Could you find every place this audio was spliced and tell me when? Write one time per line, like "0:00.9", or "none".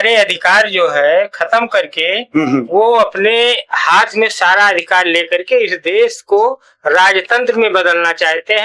none